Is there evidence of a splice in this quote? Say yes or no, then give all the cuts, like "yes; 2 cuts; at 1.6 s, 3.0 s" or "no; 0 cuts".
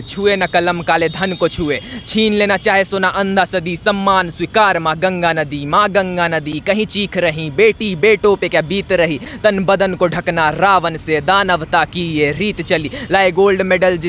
no; 0 cuts